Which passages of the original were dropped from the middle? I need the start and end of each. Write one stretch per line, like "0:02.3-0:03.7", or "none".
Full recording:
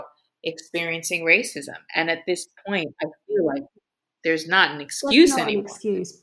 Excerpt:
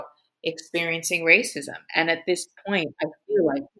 none